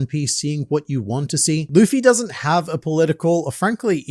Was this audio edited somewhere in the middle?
yes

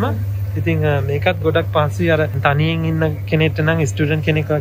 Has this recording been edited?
yes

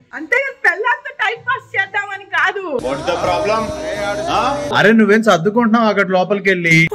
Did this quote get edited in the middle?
no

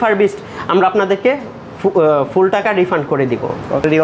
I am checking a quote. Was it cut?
no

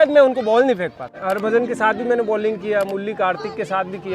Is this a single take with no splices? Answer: no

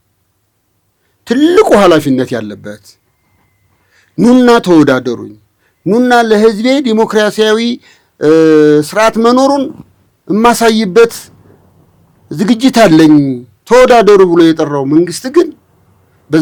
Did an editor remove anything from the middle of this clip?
no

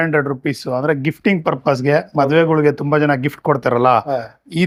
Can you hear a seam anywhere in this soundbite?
no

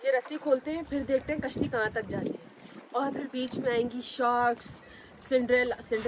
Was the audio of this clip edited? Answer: no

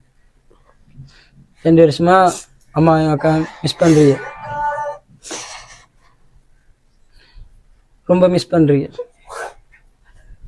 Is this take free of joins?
yes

